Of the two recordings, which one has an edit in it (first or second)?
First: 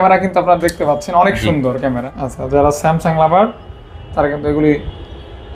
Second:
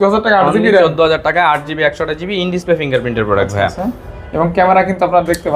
first